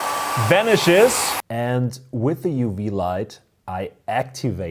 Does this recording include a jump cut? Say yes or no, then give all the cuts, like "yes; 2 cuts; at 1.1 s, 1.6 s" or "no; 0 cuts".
yes; 1 cut; at 1.4 s